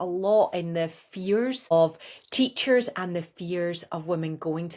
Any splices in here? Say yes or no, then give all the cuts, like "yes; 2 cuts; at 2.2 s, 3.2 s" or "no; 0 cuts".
yes; 1 cut; at 1.7 s